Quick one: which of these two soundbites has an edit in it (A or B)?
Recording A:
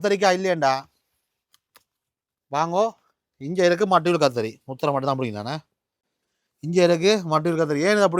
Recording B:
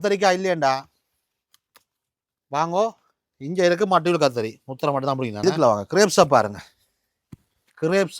B